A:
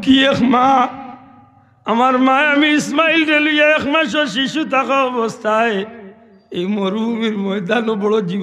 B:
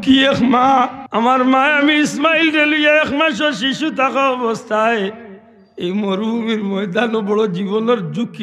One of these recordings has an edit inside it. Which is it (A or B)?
B